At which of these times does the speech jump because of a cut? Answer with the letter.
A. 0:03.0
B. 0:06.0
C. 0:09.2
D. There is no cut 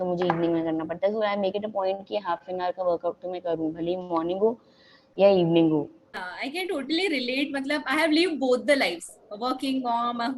B